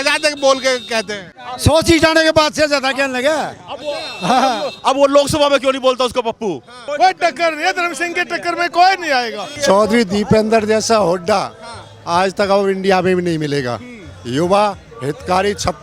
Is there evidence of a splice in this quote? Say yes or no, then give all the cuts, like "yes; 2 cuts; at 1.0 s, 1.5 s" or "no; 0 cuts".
yes; 3 cuts; at 1.2 s, 6.8 s, 9.5 s